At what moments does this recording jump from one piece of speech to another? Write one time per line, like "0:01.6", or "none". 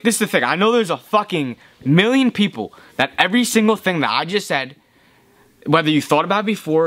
none